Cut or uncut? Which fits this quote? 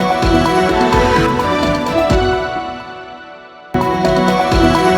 cut